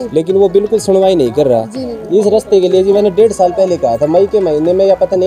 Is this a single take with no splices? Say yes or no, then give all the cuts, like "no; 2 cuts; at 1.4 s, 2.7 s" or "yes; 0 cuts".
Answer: yes; 0 cuts